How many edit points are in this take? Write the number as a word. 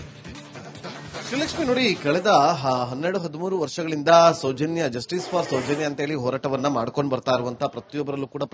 one